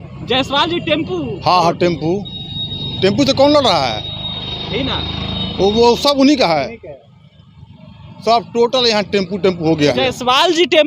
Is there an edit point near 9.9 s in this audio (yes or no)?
yes